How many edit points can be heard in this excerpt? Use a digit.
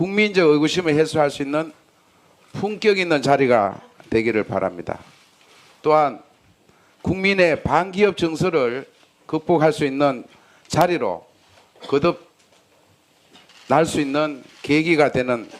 1